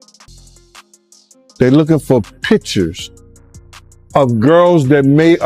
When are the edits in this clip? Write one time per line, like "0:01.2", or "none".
0:00.9